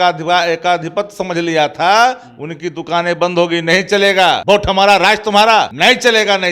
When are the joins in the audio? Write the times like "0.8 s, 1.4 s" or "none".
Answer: 4.4 s, 5.7 s